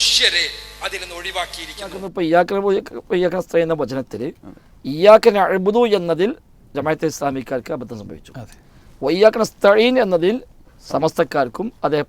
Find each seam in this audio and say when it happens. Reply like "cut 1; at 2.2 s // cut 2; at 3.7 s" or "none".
cut 1; at 2.0 s